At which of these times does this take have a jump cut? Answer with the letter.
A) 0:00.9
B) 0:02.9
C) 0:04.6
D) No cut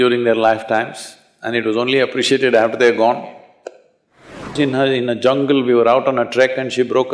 C